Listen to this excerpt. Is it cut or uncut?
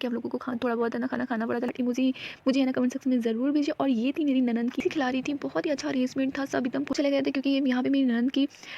cut